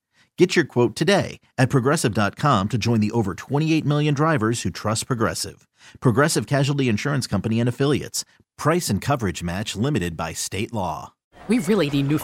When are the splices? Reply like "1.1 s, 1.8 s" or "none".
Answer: 11.2 s